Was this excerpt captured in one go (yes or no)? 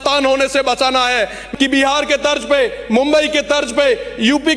no